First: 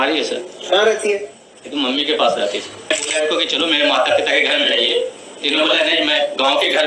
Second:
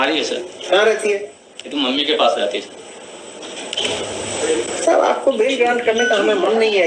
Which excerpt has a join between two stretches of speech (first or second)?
first